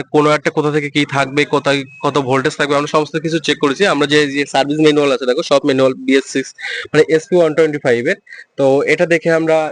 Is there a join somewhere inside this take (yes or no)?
no